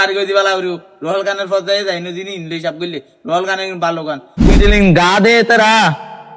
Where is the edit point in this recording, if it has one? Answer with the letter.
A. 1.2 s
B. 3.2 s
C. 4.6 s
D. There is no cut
C